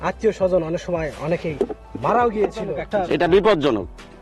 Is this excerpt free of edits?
no; 1 cut; at 2.8 s

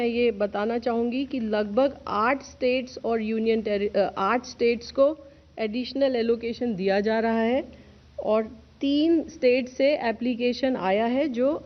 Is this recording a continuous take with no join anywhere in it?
yes; 0 cuts

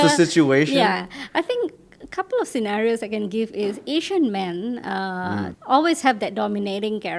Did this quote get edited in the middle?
no; 0 cuts

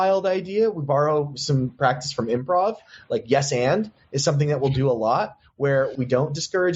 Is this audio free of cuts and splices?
no; 2 cuts; at 1.7 s, 5.9 s

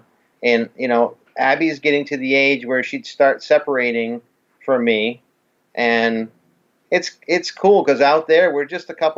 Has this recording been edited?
no; 0 cuts

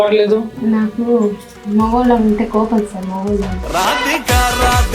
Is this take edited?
yes; 1 cut; at 3.6 s

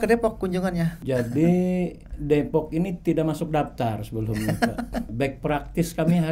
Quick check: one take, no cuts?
no; 2 cuts; at 1.0 s, 5.1 s

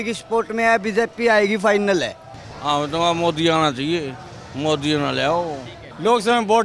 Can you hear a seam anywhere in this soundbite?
no; 0 cuts

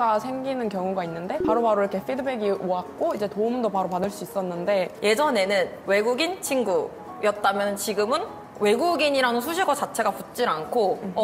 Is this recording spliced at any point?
yes; 2 cuts; at 1.3 s, 5.0 s

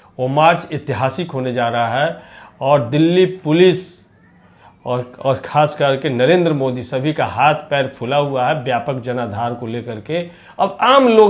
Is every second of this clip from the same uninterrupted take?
yes; 0 cuts

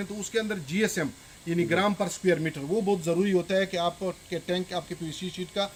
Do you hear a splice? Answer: no; 0 cuts

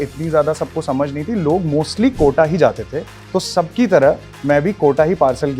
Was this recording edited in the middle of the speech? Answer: no; 0 cuts

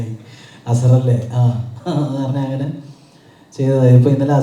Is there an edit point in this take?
no; 0 cuts

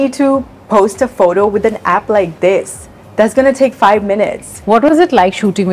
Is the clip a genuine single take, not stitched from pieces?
no; 1 cut; at 4.5 s

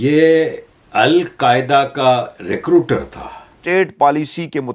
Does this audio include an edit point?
yes; 1 cut; at 3.5 s

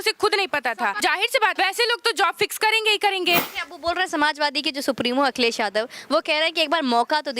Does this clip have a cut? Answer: yes; 2 cuts; at 1.4 s, 3.5 s

